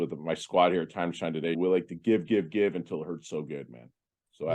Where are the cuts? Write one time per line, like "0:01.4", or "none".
0:01.6